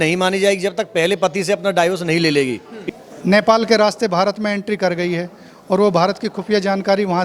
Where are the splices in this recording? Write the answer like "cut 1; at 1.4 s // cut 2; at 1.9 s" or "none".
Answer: cut 1; at 2.7 s